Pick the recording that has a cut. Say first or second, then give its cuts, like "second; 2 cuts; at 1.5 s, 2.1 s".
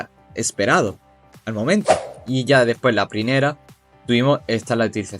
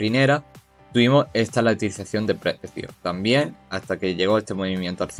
first; 1 cut; at 2.2 s